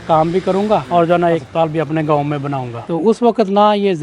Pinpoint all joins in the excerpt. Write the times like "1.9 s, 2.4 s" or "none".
2.7 s